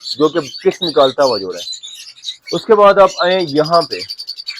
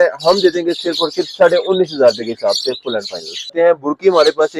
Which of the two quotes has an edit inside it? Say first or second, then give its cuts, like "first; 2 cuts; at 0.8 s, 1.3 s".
second; 1 cut; at 3.5 s